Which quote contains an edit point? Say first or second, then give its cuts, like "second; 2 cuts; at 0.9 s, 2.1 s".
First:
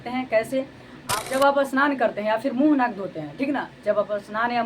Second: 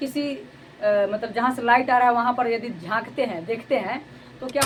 first; 1 cut; at 1.0 s